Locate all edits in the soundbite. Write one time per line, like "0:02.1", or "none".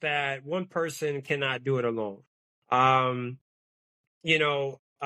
none